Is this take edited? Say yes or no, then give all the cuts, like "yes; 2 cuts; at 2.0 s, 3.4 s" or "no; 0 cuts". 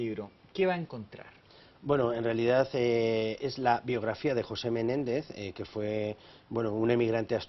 yes; 1 cut; at 5.1 s